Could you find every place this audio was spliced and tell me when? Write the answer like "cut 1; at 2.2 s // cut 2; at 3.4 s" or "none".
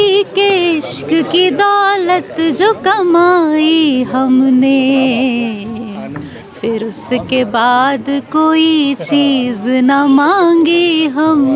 none